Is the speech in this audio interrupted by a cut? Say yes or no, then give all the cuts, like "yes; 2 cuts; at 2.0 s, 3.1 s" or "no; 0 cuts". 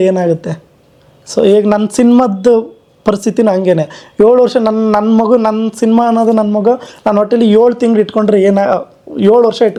no; 0 cuts